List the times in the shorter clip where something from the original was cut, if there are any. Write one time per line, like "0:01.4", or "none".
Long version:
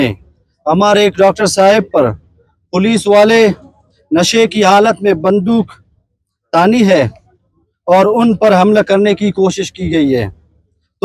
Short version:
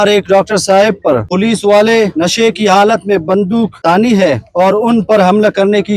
0:01.3
0:02.1
0:03.7
0:04.5